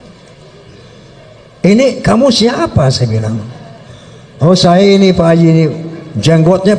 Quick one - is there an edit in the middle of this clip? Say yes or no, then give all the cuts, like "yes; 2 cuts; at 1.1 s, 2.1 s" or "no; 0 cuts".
no; 0 cuts